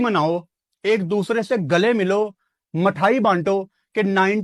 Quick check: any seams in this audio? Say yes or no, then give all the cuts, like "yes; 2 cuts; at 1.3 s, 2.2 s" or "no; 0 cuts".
no; 0 cuts